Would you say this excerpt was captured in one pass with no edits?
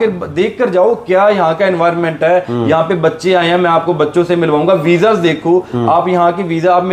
yes; 0 cuts

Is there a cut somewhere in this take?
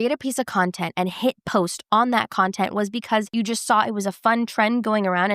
yes; 1 cut; at 3.3 s

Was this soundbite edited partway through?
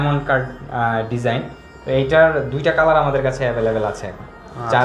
no; 0 cuts

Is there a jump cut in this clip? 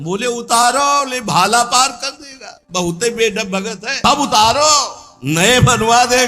yes; 1 cut; at 3.9 s

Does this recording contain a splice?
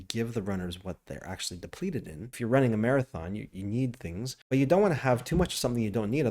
yes; 2 cuts; at 2.4 s, 4.3 s

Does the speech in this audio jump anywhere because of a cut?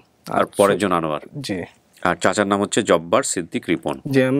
no; 0 cuts

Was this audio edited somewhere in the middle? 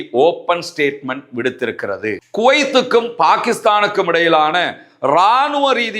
yes; 1 cut; at 2.2 s

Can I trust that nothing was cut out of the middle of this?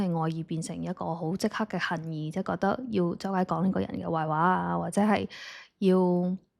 yes; 0 cuts

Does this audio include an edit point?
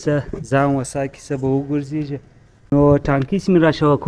yes; 1 cut; at 2.7 s

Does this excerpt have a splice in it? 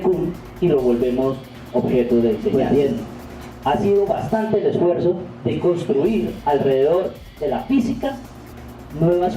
yes; 1 cut; at 2.5 s

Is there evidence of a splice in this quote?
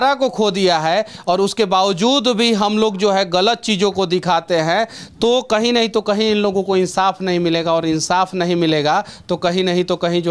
no; 0 cuts

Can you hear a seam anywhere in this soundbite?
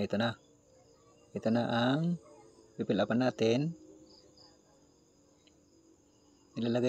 no; 0 cuts

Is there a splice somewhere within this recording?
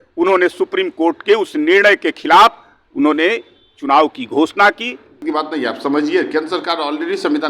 yes; 1 cut; at 5.1 s

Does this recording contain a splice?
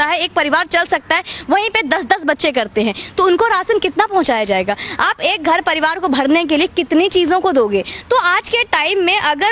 no; 0 cuts

